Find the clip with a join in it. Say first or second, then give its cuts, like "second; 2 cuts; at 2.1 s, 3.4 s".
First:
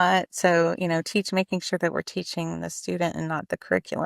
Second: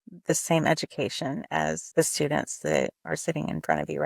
second; 2 cuts; at 1.8 s, 3.0 s